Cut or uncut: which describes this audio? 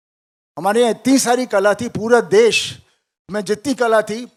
uncut